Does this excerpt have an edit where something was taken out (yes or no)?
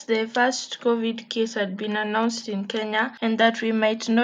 yes